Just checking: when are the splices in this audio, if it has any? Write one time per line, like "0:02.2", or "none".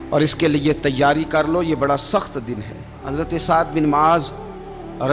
0:03.0